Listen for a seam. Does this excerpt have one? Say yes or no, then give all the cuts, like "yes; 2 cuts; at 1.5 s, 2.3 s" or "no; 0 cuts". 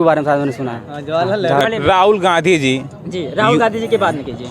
yes; 1 cut; at 1.6 s